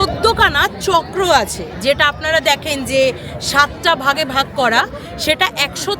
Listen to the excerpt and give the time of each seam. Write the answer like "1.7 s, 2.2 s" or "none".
none